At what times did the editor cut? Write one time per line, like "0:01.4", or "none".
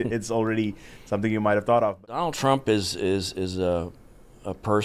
0:02.3